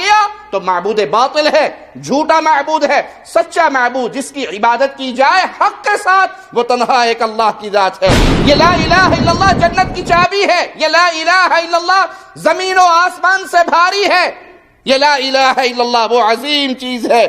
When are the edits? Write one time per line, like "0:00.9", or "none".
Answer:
0:08.3

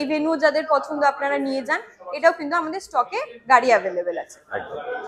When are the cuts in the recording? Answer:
none

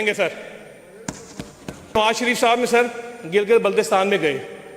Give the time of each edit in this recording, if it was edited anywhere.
0:02.0

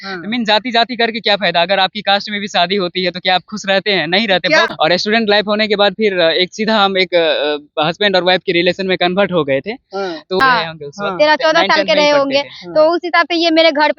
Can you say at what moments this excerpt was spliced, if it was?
0:04.7
0:10.4

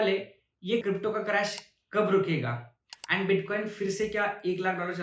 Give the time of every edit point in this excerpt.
none

